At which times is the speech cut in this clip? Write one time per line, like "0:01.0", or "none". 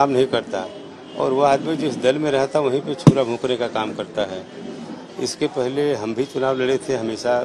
none